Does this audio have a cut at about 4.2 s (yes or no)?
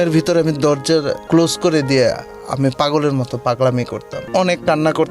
yes